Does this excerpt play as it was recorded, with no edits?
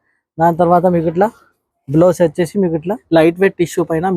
no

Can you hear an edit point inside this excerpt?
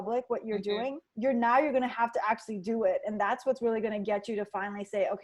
yes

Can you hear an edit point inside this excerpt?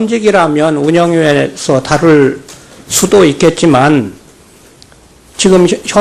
yes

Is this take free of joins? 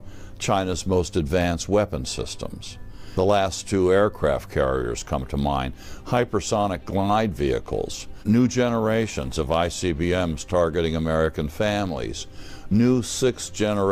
no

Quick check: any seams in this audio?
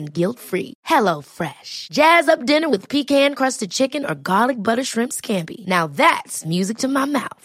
no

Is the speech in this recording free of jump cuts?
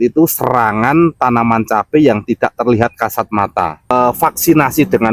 no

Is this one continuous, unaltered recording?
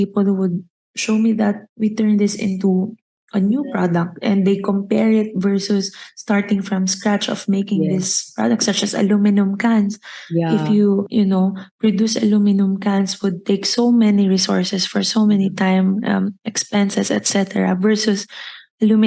yes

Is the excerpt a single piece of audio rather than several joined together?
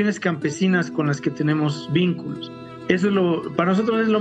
yes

